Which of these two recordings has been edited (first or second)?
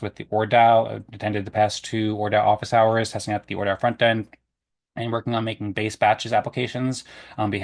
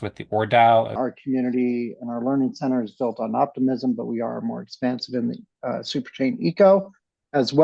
second